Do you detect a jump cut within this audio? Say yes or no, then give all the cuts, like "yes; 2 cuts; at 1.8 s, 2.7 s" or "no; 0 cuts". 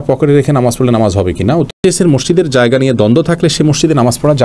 yes; 1 cut; at 1.8 s